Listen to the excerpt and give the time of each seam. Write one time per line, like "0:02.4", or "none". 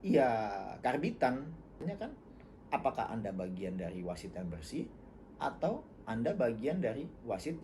0:01.8